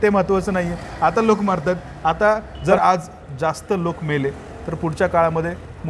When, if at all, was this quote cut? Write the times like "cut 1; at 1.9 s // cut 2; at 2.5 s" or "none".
cut 1; at 2.6 s